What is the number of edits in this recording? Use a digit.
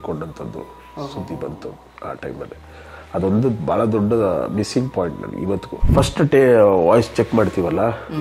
1